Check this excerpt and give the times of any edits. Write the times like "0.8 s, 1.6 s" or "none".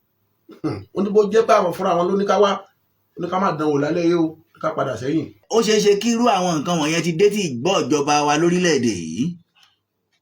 5.4 s